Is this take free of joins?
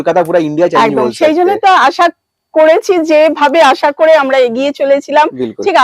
yes; 0 cuts

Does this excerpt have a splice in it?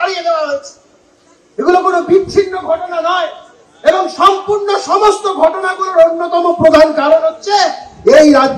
no; 0 cuts

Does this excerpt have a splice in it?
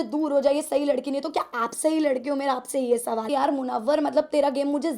yes; 1 cut; at 3.3 s

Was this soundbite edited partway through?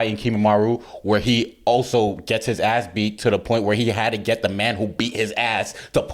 no; 0 cuts

